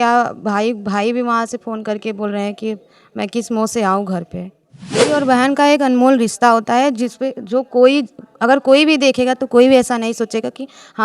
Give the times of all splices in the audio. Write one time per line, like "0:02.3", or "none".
0:05.1